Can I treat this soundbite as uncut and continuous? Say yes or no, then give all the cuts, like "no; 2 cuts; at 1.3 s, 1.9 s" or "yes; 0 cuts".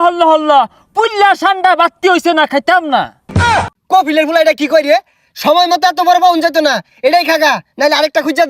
no; 1 cut; at 3.4 s